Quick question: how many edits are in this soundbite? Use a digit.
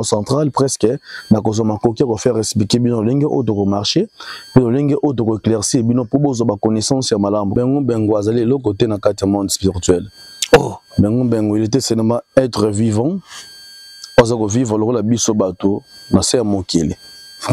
1